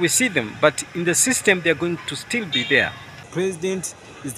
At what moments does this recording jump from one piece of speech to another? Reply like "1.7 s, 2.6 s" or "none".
3.3 s